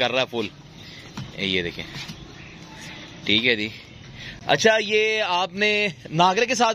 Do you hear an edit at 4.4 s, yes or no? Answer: no